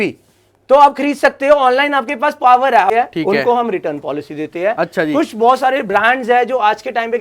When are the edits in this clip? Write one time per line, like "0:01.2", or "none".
0:02.9